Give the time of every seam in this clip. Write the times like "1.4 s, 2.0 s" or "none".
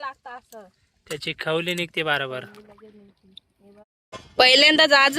3.9 s